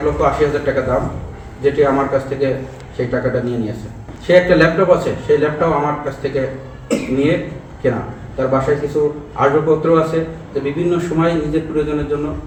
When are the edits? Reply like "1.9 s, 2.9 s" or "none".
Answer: none